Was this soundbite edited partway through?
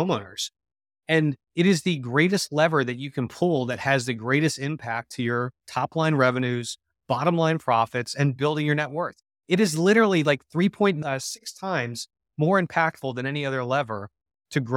yes; 1 cut; at 11.0 s

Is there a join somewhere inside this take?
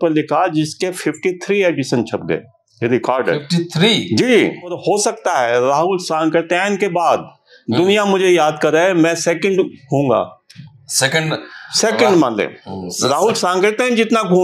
yes; 1 cut; at 4.8 s

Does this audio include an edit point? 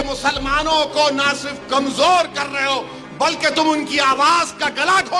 no; 0 cuts

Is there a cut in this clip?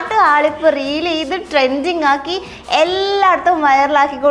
no; 0 cuts

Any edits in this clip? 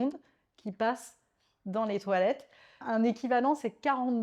yes; 1 cut; at 2.7 s

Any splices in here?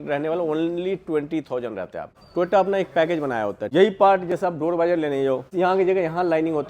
yes; 3 cuts; at 2.1 s, 3.6 s, 5.5 s

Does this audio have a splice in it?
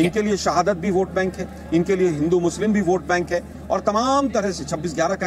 no; 0 cuts

